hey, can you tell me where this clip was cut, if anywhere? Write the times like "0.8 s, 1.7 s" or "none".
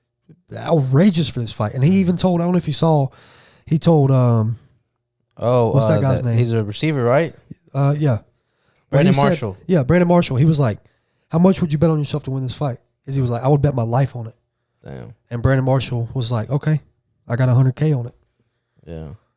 none